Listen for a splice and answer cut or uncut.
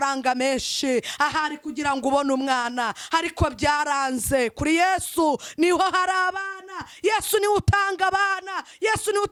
uncut